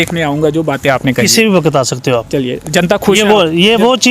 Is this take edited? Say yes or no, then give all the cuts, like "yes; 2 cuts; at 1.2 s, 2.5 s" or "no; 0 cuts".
no; 0 cuts